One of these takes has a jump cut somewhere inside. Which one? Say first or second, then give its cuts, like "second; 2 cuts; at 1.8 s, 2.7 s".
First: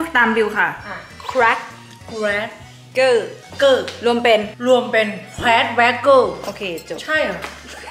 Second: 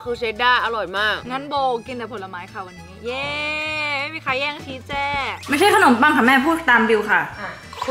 second; 1 cut; at 5.4 s